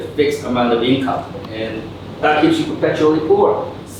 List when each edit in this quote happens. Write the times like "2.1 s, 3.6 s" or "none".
1.4 s

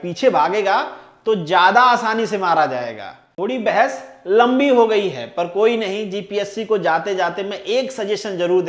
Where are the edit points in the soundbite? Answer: 3.2 s

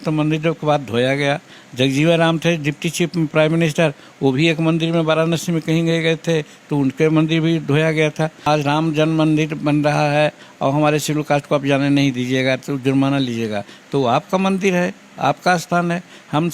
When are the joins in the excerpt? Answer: 8.4 s

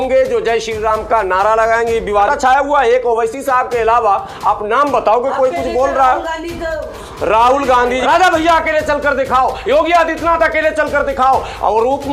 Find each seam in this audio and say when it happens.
2.3 s, 8.0 s

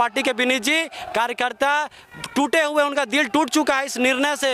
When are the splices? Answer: none

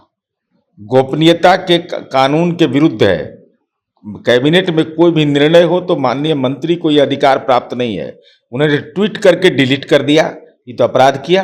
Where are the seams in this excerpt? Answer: none

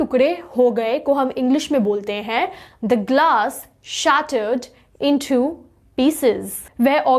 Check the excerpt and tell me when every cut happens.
none

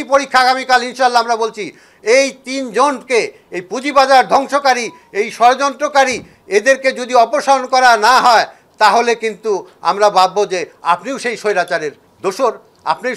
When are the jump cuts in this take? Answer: 12.0 s

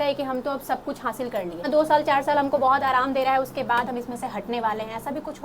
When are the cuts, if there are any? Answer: 1.7 s

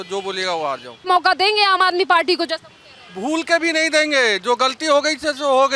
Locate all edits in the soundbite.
1.1 s

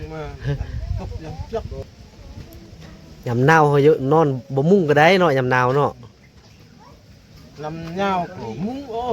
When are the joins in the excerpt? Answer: 1.8 s

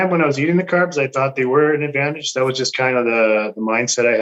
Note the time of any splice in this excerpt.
none

